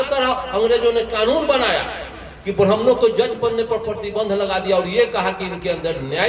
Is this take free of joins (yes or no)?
yes